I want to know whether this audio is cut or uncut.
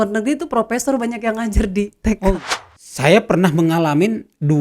cut